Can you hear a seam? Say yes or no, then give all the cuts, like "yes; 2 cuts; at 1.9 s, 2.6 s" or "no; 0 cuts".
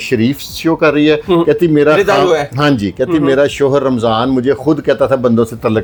no; 0 cuts